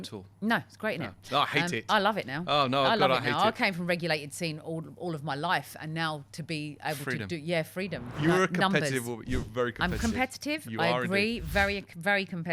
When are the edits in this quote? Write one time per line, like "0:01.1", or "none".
0:08.1